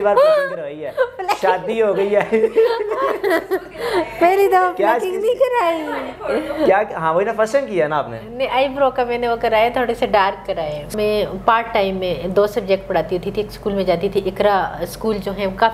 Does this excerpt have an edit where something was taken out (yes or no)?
yes